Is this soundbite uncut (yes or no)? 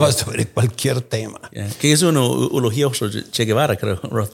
yes